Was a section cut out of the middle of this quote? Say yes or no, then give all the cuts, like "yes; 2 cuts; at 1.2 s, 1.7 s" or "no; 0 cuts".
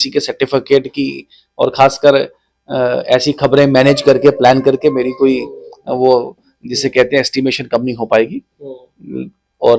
no; 0 cuts